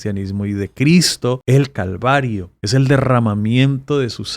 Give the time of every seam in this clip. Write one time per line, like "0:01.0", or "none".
0:01.4
0:02.5